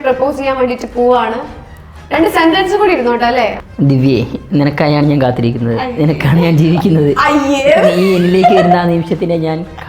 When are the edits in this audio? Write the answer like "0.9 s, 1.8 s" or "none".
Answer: 3.6 s

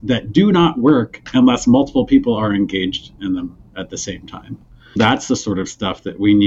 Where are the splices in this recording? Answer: 3.1 s, 5.0 s

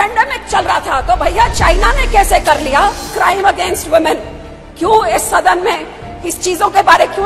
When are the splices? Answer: 3.1 s

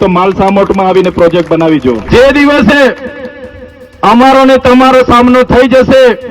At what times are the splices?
2.0 s

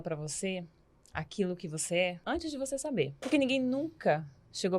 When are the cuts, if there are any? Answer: 2.2 s, 3.3 s

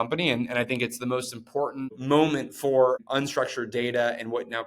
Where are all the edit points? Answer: 2.0 s, 3.0 s

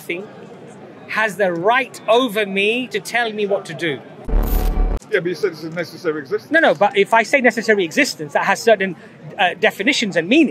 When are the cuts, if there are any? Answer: 4.6 s

